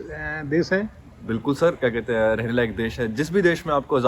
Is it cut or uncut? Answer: uncut